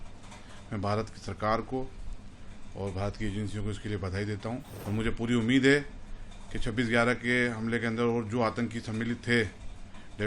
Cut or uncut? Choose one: cut